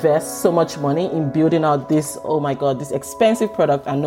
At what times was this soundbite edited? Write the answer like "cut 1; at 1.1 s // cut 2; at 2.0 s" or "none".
none